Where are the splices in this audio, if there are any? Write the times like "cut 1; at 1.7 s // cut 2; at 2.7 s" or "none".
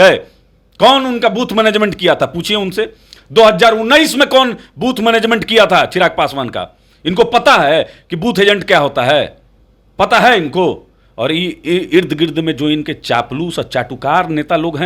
none